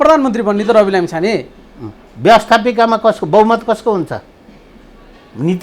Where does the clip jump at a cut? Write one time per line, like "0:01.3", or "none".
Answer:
none